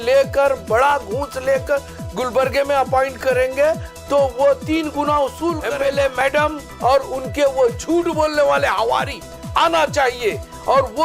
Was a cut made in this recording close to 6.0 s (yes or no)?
yes